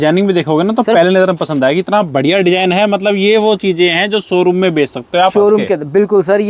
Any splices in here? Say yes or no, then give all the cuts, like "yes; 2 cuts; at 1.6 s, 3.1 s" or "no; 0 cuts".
no; 0 cuts